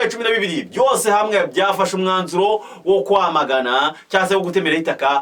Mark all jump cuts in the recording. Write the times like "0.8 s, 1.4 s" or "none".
none